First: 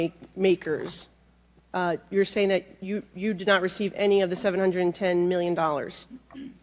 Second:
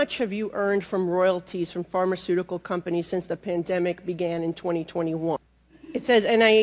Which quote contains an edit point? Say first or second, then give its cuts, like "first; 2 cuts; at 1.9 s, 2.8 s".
second; 1 cut; at 5.4 s